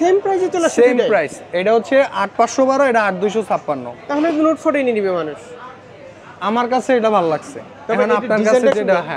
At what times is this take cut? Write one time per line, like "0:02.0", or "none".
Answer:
none